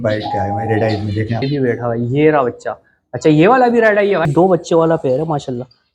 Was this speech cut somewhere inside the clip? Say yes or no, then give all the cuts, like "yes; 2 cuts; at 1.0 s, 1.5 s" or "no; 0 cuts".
yes; 2 cuts; at 1.4 s, 4.3 s